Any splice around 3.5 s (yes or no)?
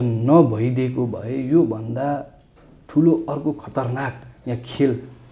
no